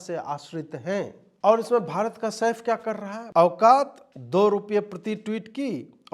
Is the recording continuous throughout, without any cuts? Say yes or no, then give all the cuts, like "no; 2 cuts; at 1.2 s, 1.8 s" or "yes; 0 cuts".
no; 1 cut; at 3.1 s